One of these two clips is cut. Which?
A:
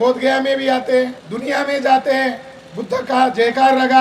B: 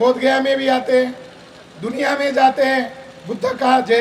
A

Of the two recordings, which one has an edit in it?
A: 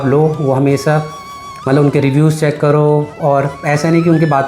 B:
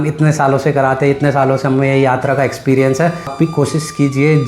B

